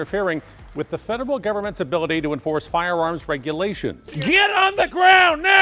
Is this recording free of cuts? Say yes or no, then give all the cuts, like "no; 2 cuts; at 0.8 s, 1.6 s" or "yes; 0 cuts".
no; 1 cut; at 4.1 s